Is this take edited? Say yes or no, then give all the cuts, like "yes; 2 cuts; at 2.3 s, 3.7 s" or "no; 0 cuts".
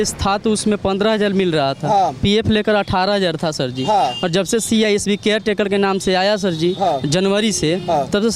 no; 0 cuts